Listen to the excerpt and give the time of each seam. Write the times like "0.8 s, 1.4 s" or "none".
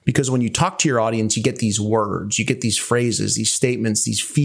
none